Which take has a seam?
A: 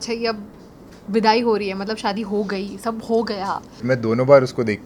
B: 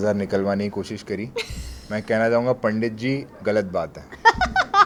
A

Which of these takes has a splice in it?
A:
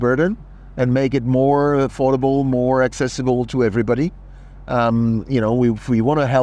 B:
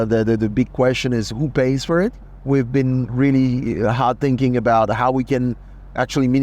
B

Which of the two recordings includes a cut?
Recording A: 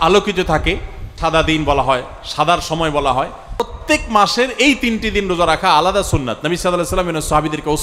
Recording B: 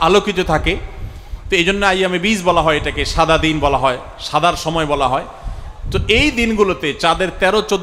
A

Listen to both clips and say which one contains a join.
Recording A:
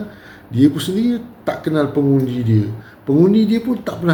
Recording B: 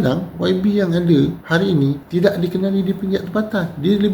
B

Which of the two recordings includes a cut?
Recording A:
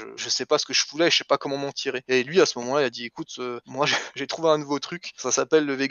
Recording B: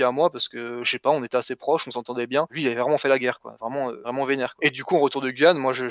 B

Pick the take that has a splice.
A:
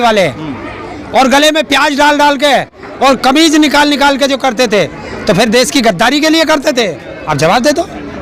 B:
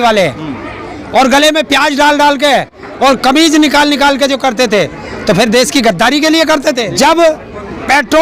B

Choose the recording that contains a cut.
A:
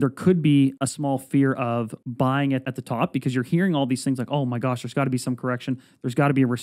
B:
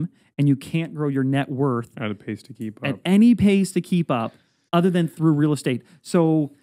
A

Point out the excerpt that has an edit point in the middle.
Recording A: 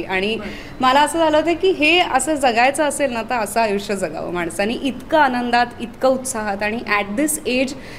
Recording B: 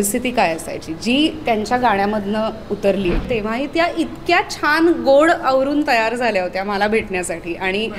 B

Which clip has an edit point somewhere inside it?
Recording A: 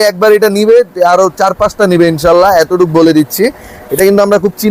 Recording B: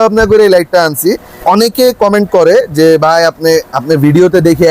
B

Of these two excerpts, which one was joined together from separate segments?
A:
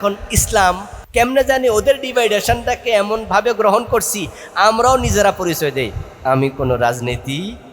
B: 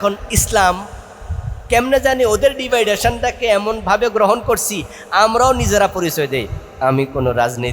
A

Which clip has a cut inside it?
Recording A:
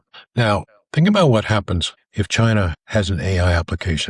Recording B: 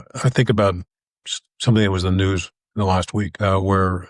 A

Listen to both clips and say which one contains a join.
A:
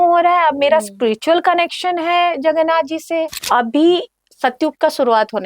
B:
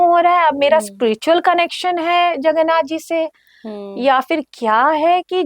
A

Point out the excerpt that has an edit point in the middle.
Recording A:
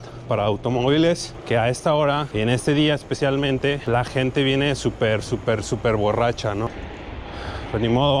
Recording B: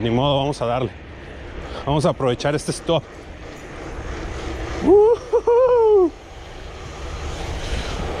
A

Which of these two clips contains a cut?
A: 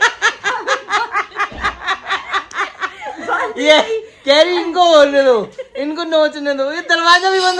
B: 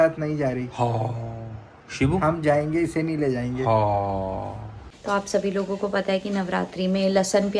B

